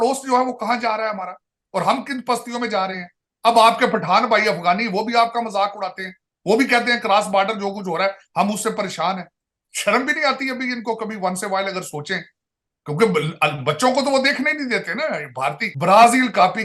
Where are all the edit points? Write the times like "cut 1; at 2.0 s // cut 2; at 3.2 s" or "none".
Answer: cut 1; at 15.7 s